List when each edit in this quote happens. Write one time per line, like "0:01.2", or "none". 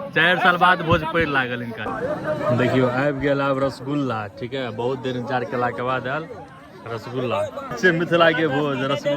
0:01.8
0:07.8